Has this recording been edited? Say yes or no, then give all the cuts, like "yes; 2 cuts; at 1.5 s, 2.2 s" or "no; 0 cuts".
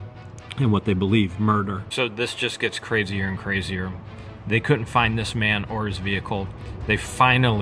yes; 1 cut; at 1.8 s